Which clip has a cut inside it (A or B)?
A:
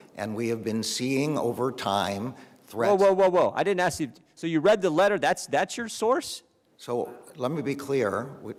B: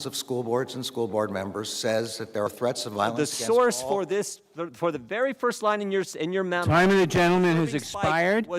B